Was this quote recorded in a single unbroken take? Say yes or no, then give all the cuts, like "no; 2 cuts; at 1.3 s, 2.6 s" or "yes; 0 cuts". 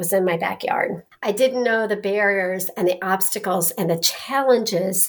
no; 1 cut; at 1.1 s